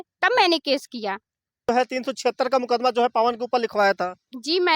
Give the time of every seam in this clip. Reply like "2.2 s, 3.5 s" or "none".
1.6 s